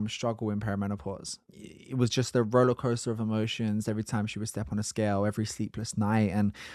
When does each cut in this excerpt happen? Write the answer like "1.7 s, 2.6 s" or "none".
1.4 s